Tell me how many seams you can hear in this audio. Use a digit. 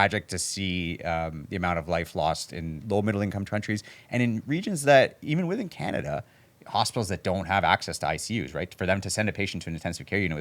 1